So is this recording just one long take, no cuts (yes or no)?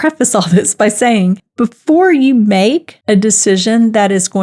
no